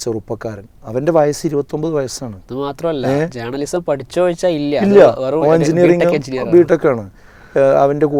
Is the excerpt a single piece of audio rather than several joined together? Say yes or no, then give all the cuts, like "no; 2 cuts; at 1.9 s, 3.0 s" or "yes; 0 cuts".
yes; 0 cuts